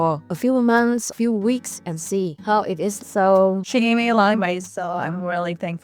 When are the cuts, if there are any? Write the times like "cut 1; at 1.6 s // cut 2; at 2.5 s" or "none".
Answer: cut 1; at 1.1 s // cut 2; at 3.0 s